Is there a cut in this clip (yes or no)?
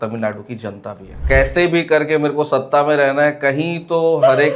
yes